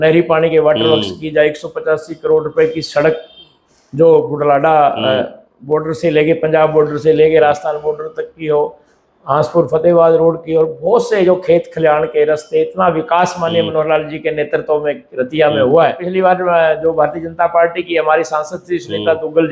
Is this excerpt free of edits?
no; 1 cut; at 16.0 s

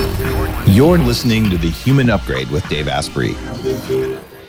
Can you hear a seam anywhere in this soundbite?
no; 0 cuts

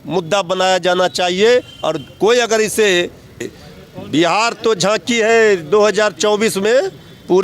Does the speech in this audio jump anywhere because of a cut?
yes; 1 cut; at 3.5 s

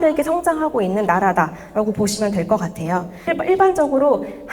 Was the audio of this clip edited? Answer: yes; 1 cut; at 3.3 s

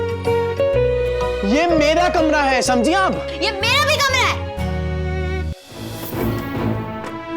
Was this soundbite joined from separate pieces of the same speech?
yes; 1 cut; at 6.0 s

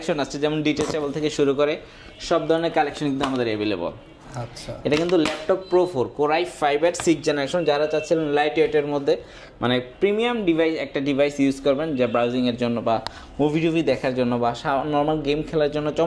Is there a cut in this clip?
no; 0 cuts

